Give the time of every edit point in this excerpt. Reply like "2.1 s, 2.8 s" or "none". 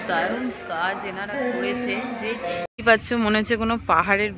2.7 s